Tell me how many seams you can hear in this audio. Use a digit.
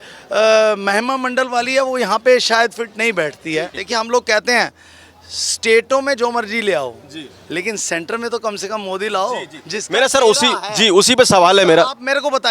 1